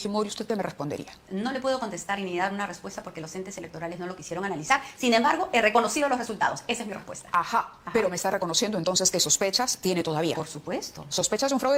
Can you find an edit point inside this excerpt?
no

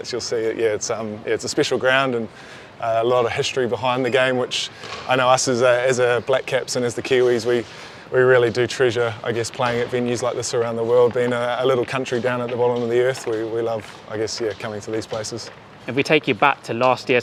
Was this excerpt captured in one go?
yes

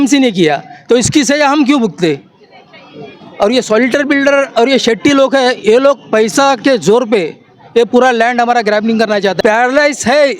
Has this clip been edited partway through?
yes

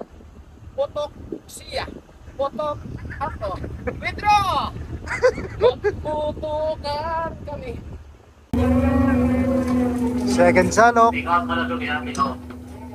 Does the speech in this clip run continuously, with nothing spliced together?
no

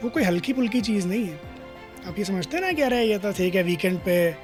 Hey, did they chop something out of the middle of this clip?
no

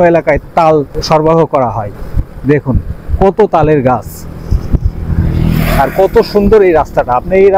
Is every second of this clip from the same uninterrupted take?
yes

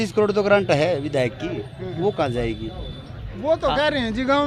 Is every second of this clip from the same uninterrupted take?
yes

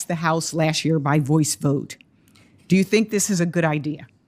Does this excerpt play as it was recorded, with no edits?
yes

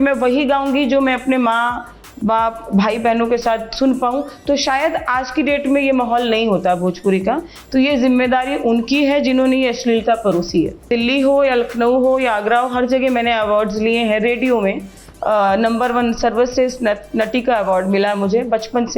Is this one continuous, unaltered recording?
no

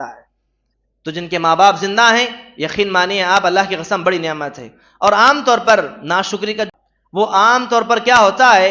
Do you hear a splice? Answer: yes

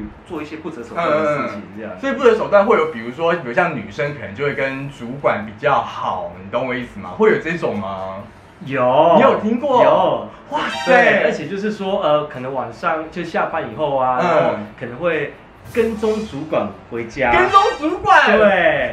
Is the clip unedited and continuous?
yes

